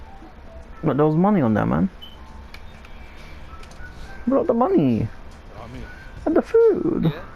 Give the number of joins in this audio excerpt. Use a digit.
0